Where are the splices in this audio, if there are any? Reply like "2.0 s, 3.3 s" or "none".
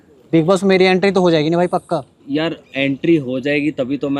2.1 s

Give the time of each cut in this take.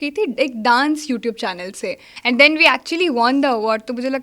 2.1 s

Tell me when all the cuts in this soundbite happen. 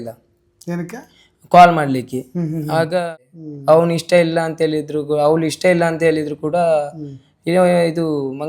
3.1 s

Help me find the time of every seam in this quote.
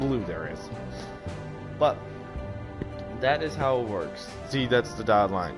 none

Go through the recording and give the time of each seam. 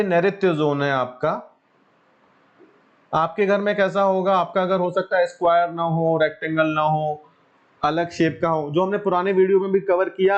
none

